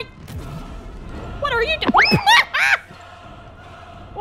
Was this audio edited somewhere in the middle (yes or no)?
no